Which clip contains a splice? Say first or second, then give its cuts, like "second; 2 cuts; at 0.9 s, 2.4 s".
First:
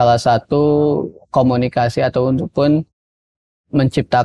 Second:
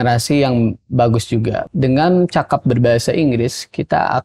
second; 1 cut; at 1.7 s